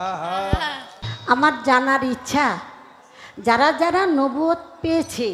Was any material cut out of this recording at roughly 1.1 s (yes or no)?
yes